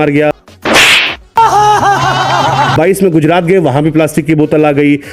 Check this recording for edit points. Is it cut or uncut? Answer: uncut